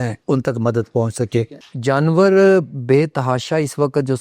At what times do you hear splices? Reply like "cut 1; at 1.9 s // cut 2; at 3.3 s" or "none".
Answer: cut 1; at 1.6 s